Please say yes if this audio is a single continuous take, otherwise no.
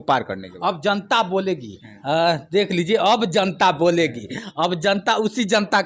yes